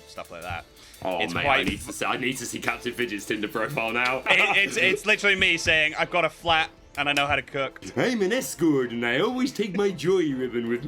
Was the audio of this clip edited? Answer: yes; 2 cuts; at 4.2 s, 7.8 s

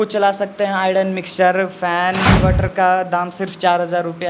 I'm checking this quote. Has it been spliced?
yes; 1 cut; at 2.2 s

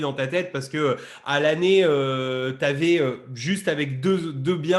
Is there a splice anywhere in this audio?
no; 0 cuts

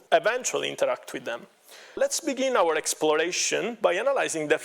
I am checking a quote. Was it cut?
yes; 1 cut; at 2.0 s

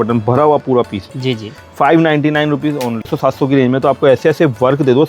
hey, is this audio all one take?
no; 1 cut; at 3.1 s

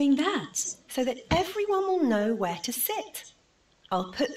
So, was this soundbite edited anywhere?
yes; 1 cut; at 1.2 s

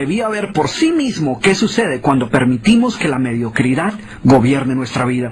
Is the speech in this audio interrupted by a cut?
yes; 1 cut; at 3.6 s

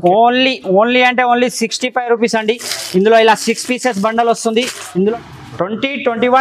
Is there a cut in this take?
yes; 1 cut; at 5.0 s

